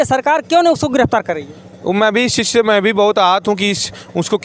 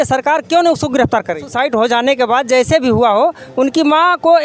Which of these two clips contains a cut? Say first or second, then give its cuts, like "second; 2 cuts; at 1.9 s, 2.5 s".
second; 1 cut; at 1.5 s